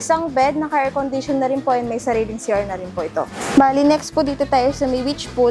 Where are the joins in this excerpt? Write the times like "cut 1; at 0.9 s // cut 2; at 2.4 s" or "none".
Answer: cut 1; at 3.4 s